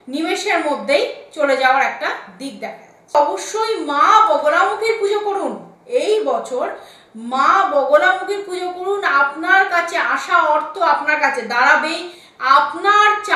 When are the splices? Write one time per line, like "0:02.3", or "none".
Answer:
0:03.1